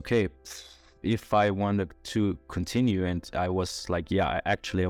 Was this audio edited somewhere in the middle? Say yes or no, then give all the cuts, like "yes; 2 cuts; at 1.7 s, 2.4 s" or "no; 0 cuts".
no; 0 cuts